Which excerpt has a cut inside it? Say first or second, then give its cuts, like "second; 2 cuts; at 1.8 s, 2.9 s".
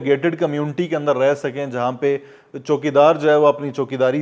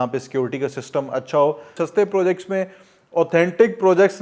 second; 1 cut; at 1.7 s